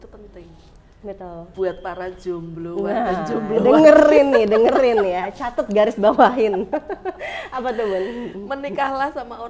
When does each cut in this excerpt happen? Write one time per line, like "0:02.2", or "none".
0:01.5